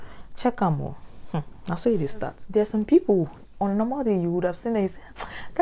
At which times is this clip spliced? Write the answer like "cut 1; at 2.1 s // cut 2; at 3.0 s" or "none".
none